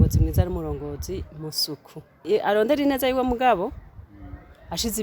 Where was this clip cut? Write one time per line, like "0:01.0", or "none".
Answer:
0:02.2